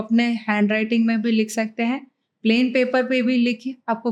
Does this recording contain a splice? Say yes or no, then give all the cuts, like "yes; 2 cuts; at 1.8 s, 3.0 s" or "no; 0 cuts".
no; 0 cuts